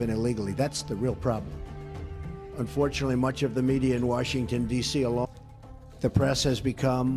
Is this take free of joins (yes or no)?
yes